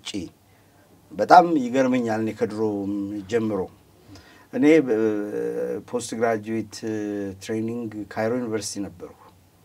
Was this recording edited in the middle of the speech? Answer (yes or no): no